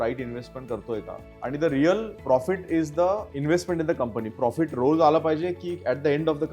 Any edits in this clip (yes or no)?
yes